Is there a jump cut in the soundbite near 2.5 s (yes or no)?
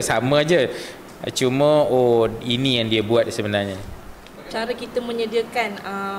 no